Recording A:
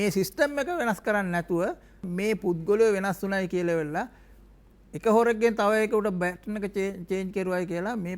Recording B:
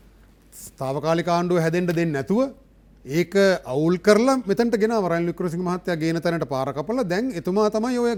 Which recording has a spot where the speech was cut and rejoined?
A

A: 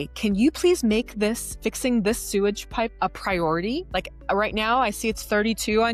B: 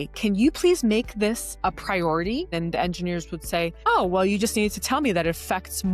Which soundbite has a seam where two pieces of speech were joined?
B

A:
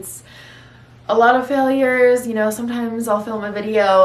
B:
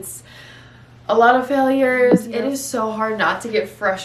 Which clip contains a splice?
B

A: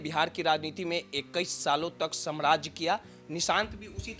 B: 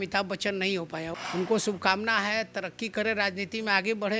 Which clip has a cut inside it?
B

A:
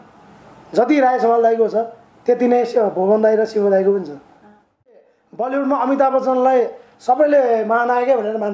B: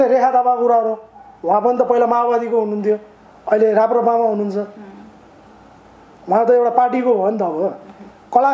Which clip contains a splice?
A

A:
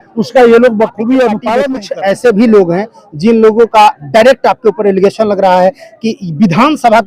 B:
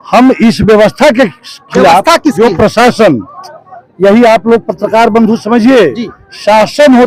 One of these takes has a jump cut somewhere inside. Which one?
A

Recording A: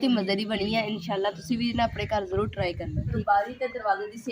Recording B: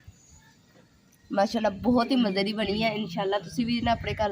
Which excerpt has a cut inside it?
A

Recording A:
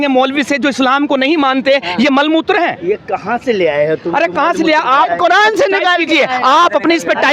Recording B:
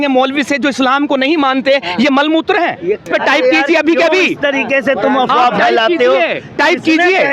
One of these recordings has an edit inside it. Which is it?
B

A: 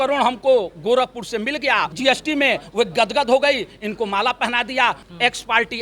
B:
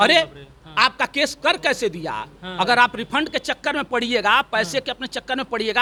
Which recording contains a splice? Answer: A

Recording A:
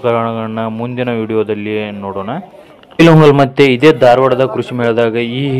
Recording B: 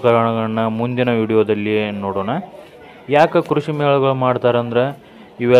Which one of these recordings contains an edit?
A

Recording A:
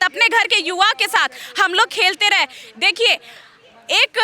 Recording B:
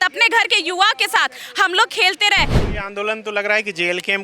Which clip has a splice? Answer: B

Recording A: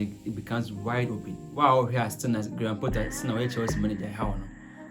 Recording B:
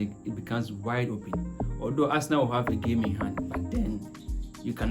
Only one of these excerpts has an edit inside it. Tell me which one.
A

